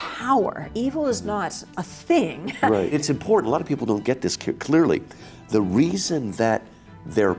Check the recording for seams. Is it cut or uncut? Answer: cut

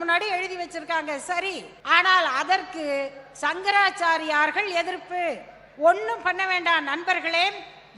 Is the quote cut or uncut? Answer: cut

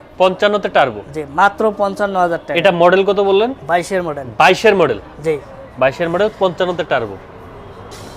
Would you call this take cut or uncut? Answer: uncut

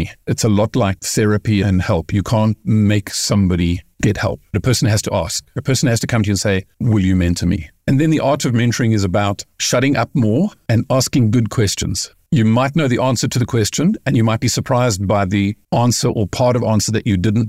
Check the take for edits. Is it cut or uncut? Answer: cut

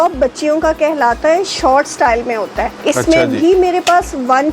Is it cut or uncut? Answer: cut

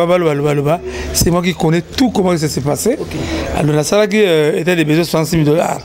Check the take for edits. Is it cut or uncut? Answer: uncut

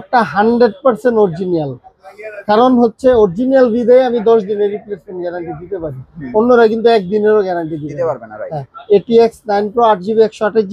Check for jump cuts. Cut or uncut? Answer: uncut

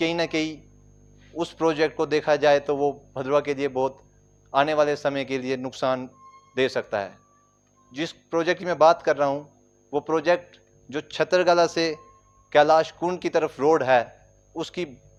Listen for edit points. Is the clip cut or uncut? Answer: uncut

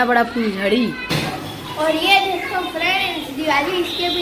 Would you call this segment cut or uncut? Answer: cut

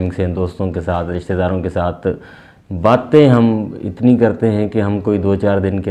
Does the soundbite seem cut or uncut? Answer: uncut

